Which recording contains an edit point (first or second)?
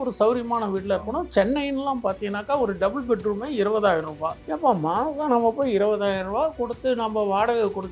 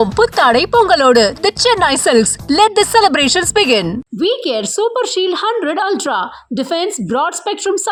first